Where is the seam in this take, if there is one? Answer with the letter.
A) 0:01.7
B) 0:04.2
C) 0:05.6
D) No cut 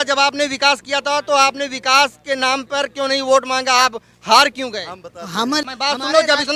C